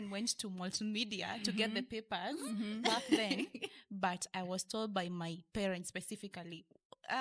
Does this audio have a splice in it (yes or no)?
no